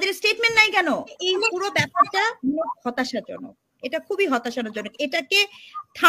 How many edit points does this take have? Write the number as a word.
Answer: one